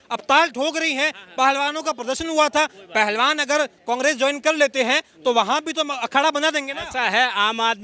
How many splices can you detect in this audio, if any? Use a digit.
0